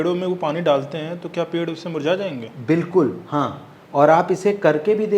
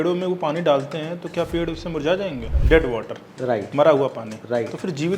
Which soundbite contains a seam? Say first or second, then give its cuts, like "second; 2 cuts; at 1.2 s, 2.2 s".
second; 1 cut; at 2.6 s